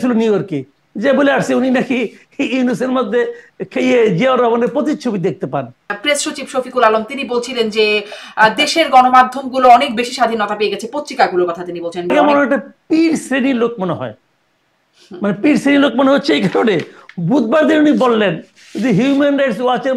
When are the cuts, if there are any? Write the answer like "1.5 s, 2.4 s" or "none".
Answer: 5.9 s, 12.1 s

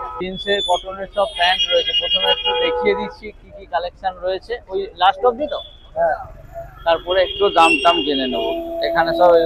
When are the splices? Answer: none

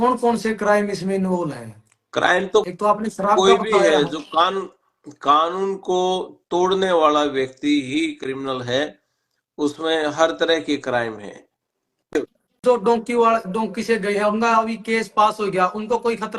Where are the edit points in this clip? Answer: 12.1 s

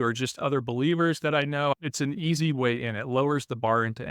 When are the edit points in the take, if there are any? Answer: 1.7 s

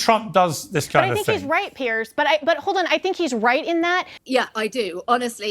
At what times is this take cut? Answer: 4.1 s

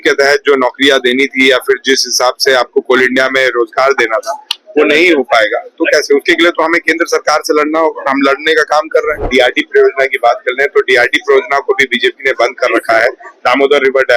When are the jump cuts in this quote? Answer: 9.3 s

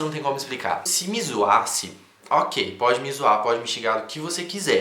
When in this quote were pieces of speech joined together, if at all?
0.9 s

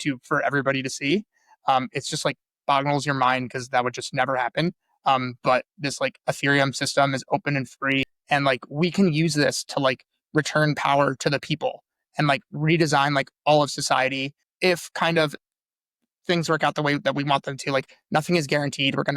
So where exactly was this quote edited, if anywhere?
8.1 s, 14.4 s

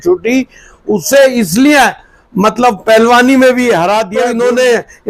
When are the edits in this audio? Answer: 4.2 s

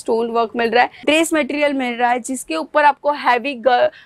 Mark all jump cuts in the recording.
1.0 s

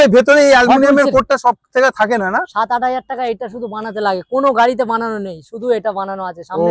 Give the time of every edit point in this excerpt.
none

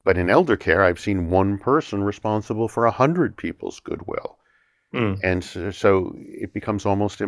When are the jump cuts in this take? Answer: none

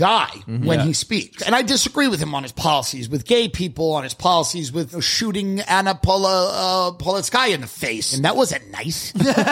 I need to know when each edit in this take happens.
1.4 s, 5.1 s, 8.1 s

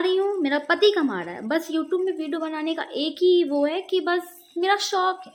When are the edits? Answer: none

